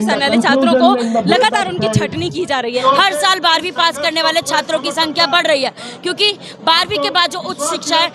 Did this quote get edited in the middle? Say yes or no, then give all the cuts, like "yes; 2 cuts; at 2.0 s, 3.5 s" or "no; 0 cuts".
yes; 1 cut; at 2.8 s